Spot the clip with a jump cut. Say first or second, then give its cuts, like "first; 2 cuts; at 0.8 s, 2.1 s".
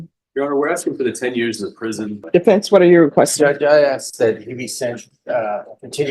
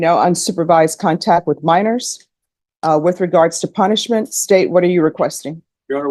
first; 1 cut; at 2.2 s